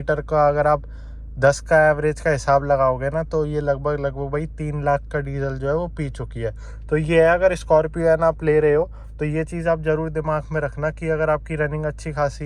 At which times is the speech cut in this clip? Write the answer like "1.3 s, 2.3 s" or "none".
none